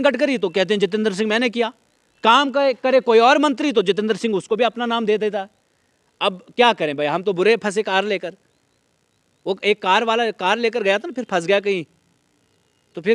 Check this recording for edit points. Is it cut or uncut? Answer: uncut